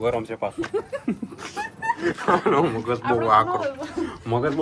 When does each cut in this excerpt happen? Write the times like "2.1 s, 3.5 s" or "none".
none